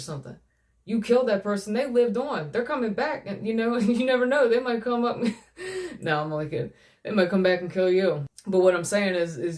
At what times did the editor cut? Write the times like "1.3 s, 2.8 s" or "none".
8.3 s